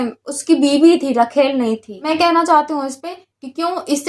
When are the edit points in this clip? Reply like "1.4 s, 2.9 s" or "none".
2.0 s